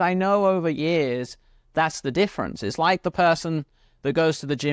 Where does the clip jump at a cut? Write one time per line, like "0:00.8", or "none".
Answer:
none